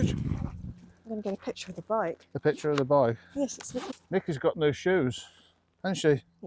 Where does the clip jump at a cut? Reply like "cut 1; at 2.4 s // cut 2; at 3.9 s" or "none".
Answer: cut 1; at 3.9 s